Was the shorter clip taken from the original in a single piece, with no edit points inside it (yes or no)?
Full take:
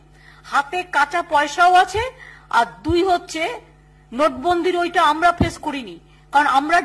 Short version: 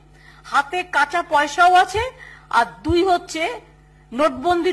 yes